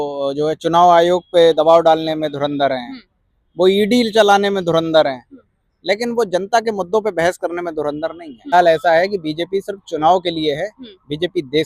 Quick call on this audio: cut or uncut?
cut